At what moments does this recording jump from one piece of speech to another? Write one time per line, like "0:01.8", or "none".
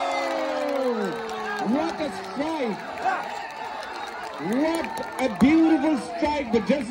0:01.0

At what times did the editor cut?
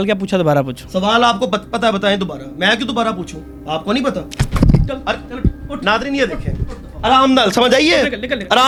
none

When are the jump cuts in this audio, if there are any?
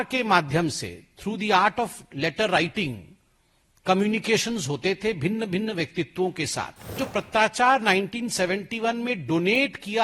0:07.0

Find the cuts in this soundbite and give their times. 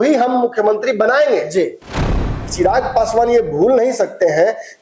0:02.4

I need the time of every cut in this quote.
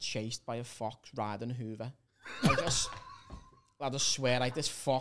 none

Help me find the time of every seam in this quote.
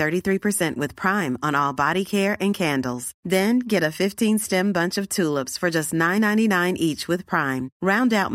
none

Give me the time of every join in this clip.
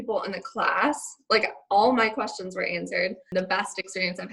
0:03.2

